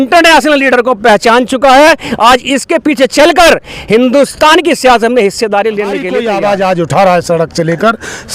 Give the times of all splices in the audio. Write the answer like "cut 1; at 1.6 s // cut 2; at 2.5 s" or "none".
cut 1; at 6.2 s